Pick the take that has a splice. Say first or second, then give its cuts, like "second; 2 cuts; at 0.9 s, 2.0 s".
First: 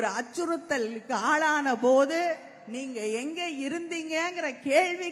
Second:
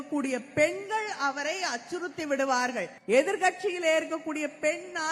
second; 1 cut; at 3.0 s